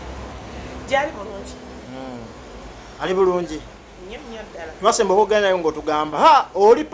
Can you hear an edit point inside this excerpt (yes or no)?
no